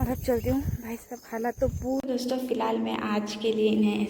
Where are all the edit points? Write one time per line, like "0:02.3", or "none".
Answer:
0:02.0